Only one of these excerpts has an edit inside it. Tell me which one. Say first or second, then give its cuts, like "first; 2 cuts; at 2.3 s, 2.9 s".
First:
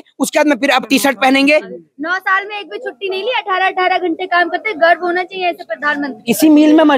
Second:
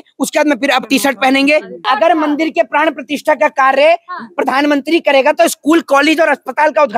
second; 1 cut; at 1.8 s